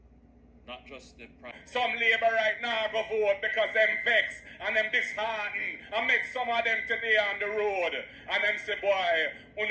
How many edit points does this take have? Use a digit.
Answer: 1